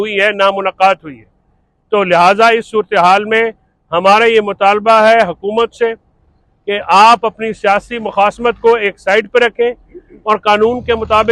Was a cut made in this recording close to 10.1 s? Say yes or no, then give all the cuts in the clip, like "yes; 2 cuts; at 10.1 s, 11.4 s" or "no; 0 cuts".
no; 0 cuts